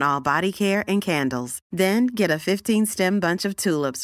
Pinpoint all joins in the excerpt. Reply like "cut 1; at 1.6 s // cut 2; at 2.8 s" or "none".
none